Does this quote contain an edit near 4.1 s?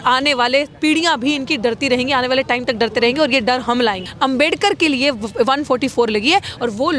yes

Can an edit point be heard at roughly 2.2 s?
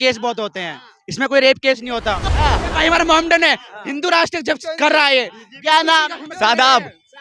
yes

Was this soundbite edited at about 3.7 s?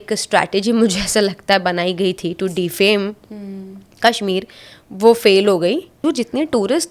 no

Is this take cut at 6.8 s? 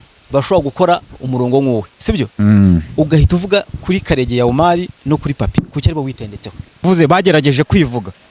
yes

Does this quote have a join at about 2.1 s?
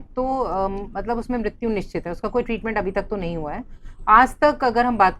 no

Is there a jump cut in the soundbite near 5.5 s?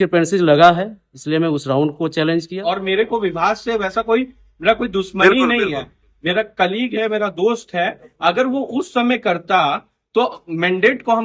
no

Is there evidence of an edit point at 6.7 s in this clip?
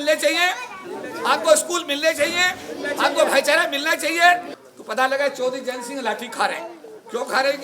no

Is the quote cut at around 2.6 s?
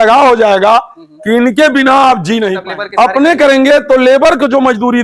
yes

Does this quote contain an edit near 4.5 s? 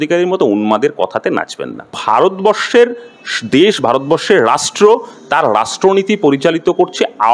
no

